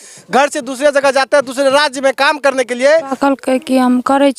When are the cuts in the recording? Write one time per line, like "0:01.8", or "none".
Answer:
0:03.1